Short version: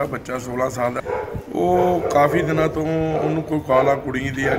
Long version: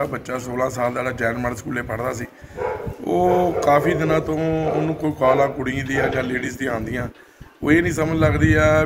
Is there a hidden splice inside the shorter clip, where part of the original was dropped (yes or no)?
yes